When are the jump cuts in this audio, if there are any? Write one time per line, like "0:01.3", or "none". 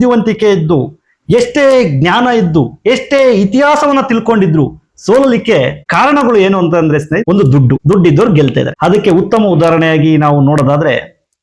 0:05.8
0:07.7
0:08.7